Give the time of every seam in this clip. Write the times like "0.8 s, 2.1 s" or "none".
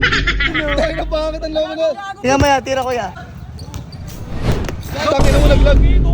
2.1 s, 3.1 s